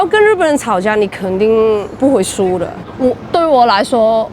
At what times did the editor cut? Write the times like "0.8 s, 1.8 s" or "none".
2.8 s

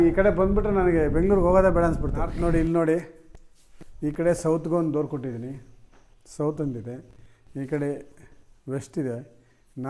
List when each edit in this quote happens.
2.2 s

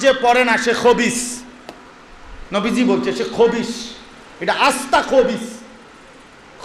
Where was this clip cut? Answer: none

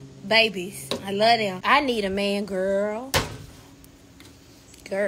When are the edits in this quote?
1.6 s

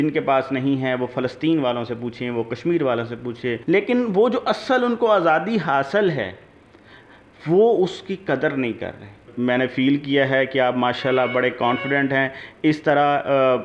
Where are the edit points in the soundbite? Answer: 3.6 s, 9.2 s

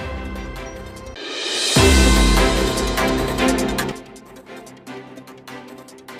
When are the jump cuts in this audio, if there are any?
none

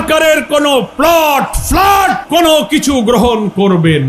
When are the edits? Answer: 2.2 s

